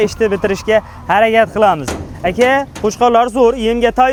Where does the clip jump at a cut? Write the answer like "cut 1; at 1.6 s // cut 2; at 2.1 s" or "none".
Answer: none